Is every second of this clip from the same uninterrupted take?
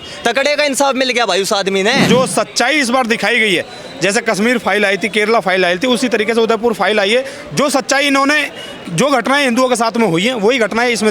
no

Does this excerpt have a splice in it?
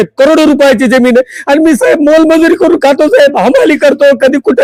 no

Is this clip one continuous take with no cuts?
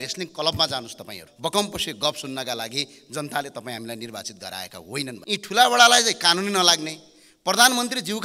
no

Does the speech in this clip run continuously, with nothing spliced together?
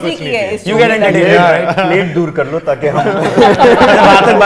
yes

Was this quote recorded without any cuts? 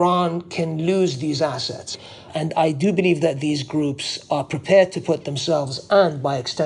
no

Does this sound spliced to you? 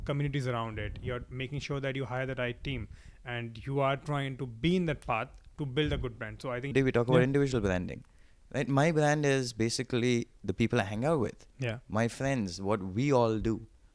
yes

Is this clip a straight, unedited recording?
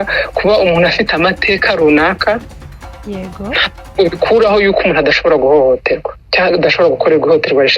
yes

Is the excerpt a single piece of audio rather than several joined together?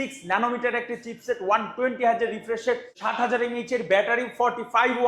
yes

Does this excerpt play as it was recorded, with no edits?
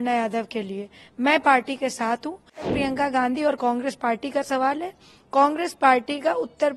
no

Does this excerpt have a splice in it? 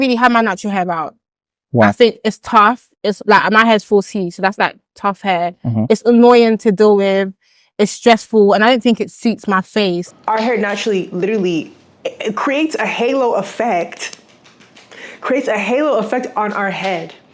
yes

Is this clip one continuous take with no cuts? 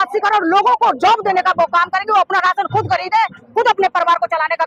yes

